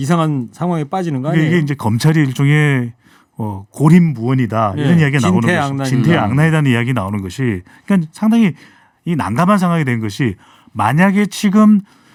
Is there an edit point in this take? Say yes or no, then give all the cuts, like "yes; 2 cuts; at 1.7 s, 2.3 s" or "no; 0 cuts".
no; 0 cuts